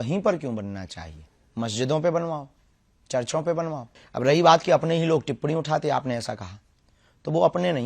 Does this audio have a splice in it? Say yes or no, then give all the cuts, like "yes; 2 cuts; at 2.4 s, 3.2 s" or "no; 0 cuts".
yes; 1 cut; at 3.9 s